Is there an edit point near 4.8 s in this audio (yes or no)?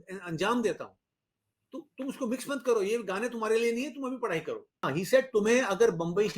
yes